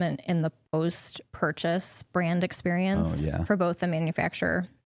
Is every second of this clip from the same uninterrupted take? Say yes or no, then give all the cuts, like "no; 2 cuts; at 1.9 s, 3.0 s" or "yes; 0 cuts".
yes; 0 cuts